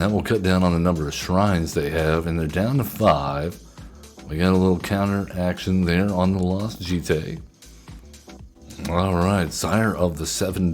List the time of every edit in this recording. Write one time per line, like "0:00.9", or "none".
0:08.5